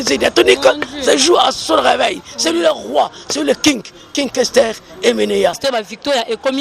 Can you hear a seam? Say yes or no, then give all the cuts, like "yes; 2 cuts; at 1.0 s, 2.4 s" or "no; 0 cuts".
yes; 1 cut; at 5.6 s